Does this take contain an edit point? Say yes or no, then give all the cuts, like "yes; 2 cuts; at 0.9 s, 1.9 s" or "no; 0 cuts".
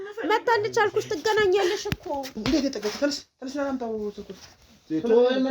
yes; 1 cut; at 2.4 s